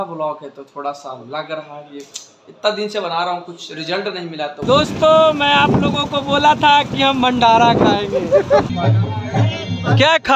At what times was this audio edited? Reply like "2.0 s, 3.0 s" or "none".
4.6 s, 8.7 s